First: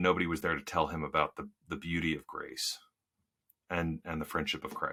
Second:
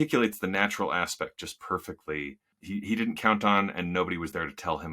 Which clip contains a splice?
second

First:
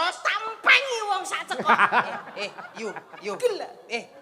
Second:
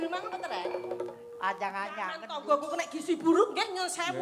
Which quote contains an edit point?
second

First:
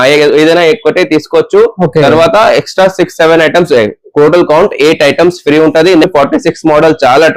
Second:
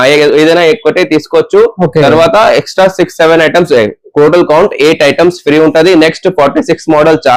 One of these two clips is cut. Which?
first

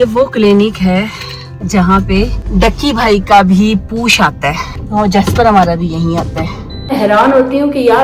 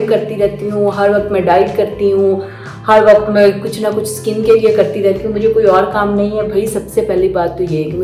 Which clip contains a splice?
first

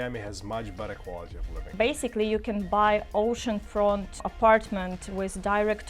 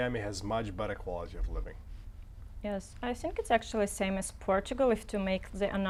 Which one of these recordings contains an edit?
first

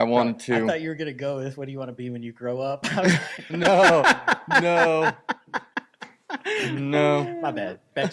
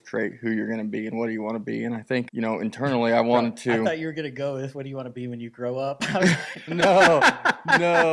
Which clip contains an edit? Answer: second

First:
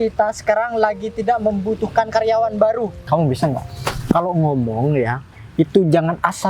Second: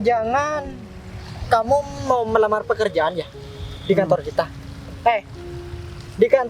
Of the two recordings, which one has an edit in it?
first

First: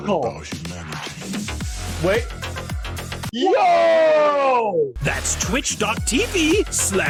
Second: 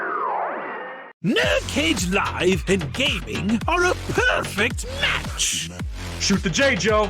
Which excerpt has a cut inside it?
second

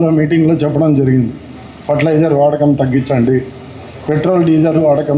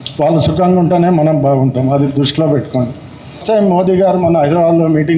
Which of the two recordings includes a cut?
second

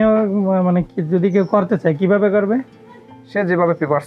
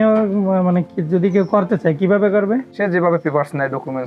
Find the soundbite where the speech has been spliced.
second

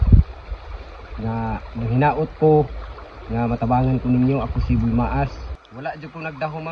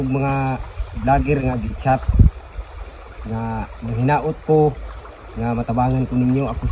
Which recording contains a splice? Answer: first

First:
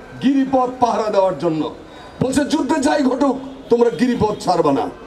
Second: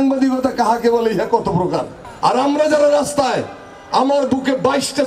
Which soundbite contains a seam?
second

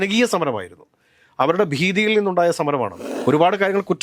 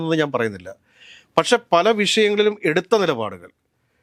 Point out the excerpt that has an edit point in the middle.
first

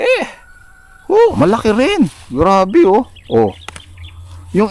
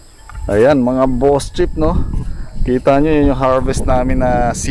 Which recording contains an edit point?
first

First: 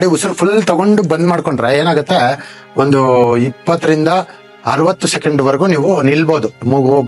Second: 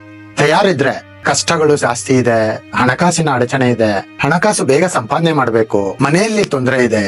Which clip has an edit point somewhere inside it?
second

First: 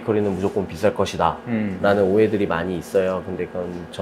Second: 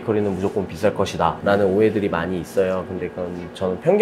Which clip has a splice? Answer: second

